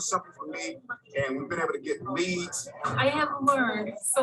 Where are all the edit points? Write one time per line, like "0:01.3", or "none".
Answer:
0:02.7